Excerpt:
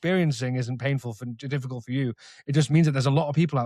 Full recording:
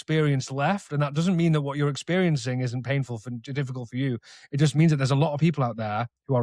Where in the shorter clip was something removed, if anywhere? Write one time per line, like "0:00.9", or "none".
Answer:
none